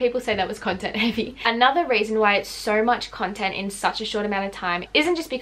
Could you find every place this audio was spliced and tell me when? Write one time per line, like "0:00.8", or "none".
none